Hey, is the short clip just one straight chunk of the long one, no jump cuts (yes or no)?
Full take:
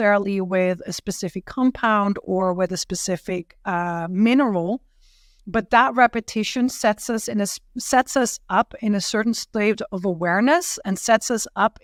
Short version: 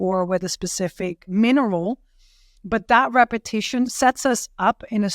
no